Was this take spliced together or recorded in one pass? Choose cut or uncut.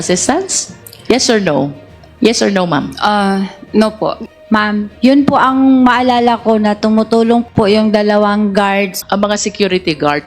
cut